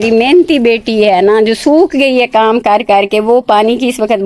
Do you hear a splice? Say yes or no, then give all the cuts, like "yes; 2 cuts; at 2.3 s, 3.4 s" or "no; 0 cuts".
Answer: no; 0 cuts